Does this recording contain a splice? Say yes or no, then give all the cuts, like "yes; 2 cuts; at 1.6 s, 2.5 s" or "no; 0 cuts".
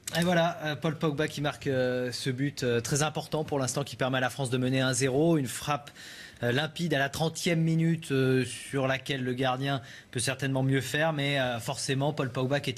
no; 0 cuts